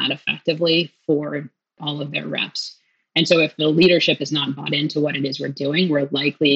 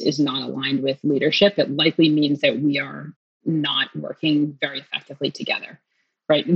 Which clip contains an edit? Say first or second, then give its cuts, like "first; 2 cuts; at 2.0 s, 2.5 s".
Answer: first; 2 cuts; at 1.8 s, 3.5 s